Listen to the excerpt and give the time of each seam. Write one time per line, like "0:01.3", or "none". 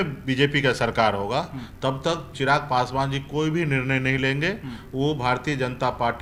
none